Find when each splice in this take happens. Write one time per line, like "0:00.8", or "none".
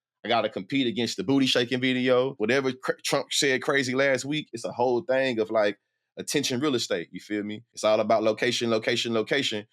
0:02.3
0:04.6
0:07.6

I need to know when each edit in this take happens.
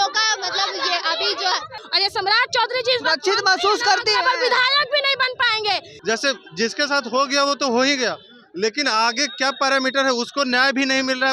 0:01.8
0:05.9

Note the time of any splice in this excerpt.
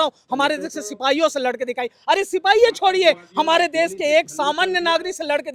none

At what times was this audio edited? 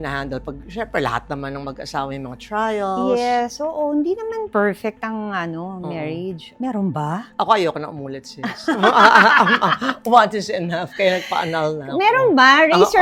none

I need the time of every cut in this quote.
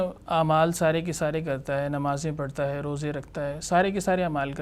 none

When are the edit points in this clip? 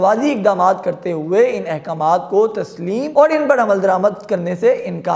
0:03.1

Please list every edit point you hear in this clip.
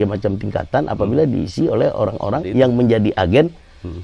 0:02.4

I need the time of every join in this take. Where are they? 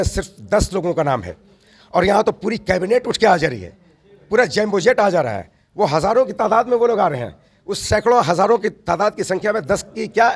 none

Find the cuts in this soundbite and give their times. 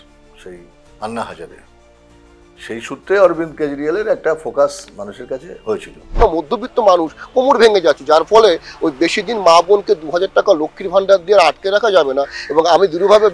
0:06.1

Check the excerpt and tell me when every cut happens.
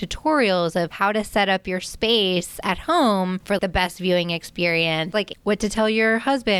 0:00.9
0:03.5
0:05.1

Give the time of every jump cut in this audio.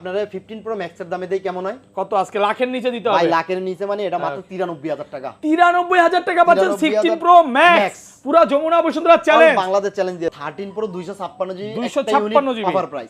0:10.3

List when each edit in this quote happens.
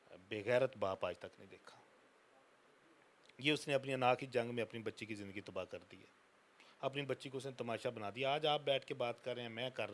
none

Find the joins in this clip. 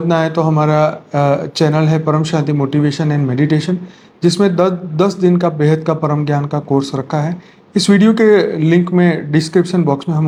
none

